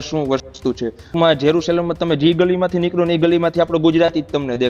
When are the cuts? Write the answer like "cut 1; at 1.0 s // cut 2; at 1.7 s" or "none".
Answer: cut 1; at 1.1 s